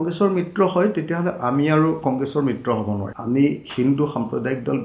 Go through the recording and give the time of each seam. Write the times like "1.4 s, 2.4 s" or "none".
3.1 s